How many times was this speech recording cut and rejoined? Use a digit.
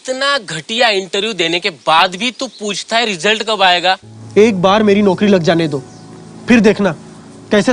1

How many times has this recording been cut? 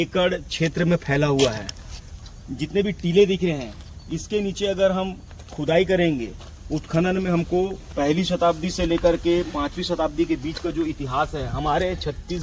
2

